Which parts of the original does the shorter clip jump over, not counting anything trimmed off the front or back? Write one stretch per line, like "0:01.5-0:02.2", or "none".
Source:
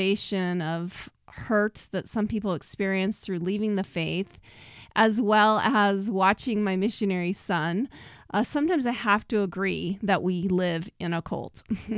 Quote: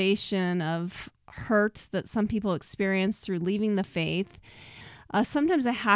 0:04.8-0:08.0